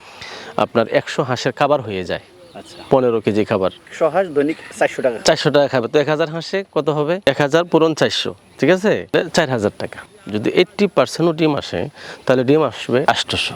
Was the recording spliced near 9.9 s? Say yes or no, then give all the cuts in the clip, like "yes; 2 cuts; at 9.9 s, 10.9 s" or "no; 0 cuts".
yes; 2 cuts; at 3.9 s, 9.9 s